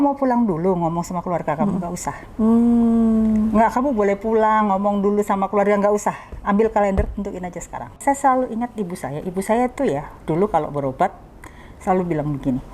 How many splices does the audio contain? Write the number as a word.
one